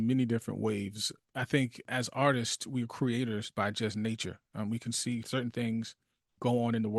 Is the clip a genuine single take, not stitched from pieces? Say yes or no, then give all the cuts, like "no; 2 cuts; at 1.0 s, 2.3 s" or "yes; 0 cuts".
no; 3 cuts; at 1.1 s, 1.9 s, 5.2 s